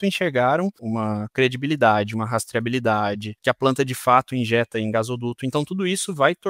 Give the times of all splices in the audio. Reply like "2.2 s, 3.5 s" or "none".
0.8 s, 3.4 s